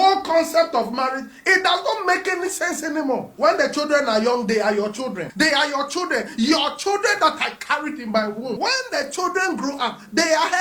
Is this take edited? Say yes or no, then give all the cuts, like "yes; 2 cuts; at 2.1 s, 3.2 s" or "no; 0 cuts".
yes; 3 cuts; at 3.3 s, 5.2 s, 8.5 s